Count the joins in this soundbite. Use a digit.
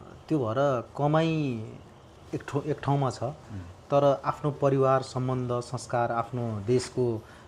0